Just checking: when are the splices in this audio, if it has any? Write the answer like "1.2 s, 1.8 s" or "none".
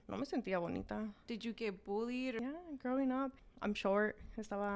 1.2 s, 2.4 s, 3.5 s

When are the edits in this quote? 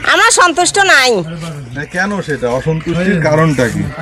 none

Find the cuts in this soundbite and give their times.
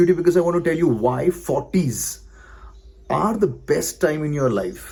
none

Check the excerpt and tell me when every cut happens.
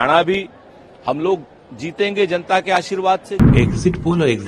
3.4 s

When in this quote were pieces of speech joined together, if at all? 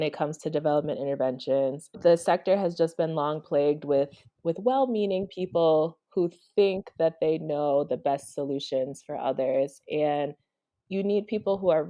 none

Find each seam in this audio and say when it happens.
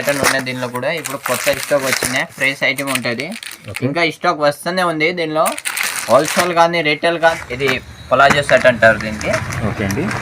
7.4 s

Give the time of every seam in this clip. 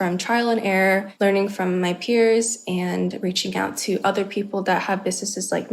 1.1 s

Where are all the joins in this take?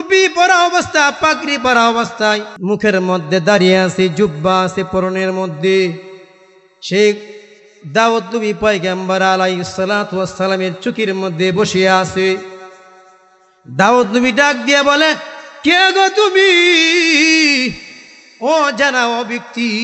2.5 s

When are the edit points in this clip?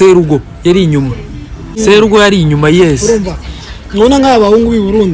1.8 s

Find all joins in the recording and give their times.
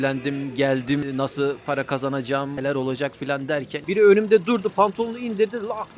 1.0 s, 3.8 s

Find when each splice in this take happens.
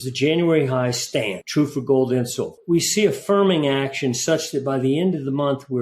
1.4 s, 2.5 s

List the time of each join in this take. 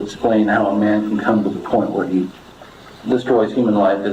none

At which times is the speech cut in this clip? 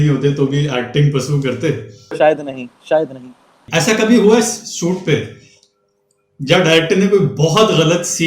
2.1 s, 3.7 s

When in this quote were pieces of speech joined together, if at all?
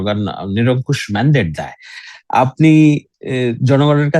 none

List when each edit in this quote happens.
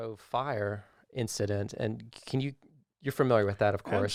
none

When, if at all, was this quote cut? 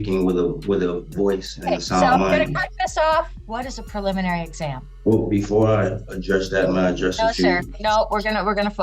3.4 s, 4.9 s

